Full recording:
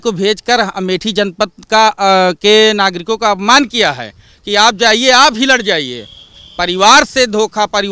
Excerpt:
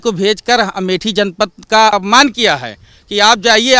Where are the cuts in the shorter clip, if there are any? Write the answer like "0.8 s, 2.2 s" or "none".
1.9 s